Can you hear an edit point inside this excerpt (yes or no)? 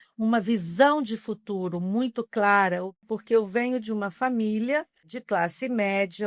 yes